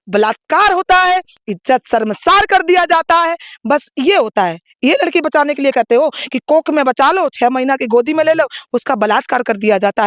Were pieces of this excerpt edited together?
no; 0 cuts

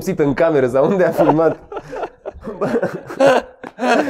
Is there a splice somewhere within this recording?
yes; 1 cut; at 2.5 s

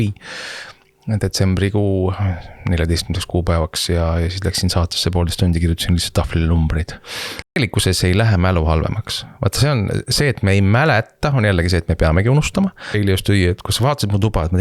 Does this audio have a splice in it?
yes; 2 cuts; at 7.6 s, 13.0 s

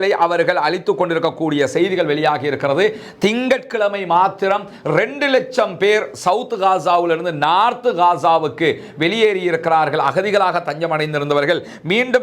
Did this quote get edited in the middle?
no; 0 cuts

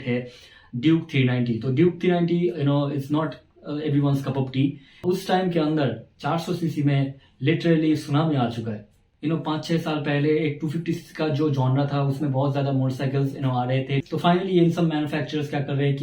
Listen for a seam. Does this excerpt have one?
yes; 3 cuts; at 5.0 s, 9.1 s, 14.0 s

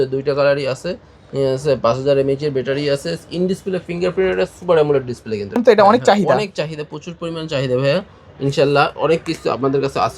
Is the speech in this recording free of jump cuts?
no; 1 cut; at 5.6 s

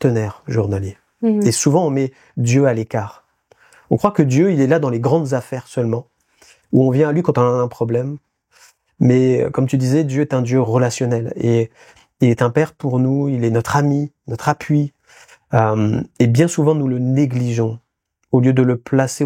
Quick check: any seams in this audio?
no; 0 cuts

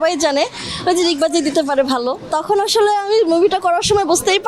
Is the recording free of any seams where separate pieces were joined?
no; 1 cut; at 2.3 s

